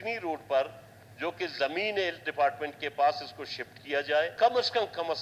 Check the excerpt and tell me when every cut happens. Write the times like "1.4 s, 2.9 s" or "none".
4.3 s